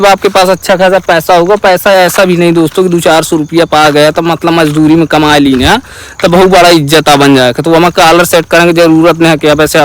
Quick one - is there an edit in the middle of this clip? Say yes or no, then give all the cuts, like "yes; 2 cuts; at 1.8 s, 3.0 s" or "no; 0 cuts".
no; 0 cuts